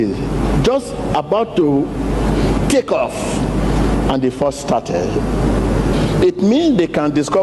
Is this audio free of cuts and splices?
yes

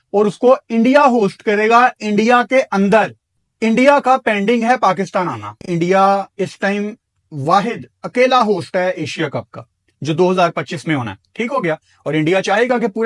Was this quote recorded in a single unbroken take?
yes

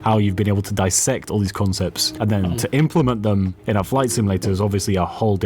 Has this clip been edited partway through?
yes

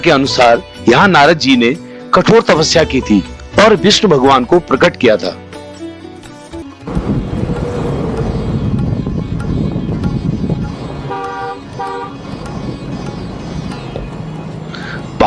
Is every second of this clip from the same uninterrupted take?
yes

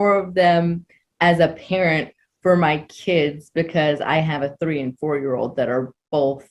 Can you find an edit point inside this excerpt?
no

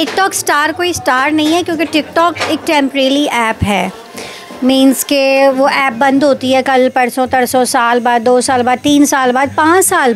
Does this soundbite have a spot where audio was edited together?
no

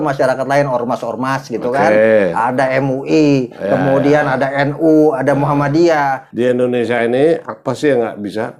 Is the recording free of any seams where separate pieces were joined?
no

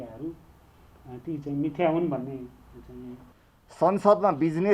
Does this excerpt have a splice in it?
yes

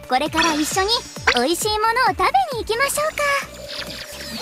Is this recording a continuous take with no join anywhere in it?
yes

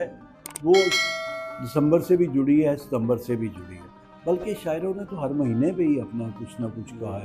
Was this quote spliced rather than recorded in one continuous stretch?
no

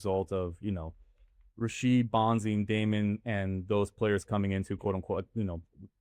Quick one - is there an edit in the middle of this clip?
no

